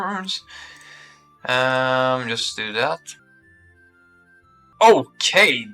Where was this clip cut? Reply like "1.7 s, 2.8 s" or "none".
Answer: 3.2 s, 4.7 s